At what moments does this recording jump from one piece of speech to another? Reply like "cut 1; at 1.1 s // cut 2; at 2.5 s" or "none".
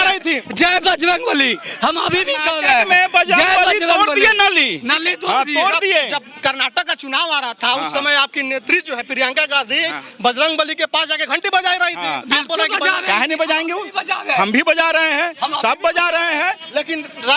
none